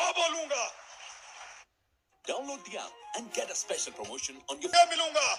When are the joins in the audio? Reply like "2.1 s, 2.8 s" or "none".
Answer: none